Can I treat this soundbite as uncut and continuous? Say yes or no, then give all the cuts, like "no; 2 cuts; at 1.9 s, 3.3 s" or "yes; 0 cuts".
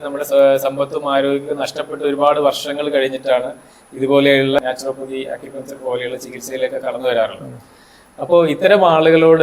no; 1 cut; at 4.6 s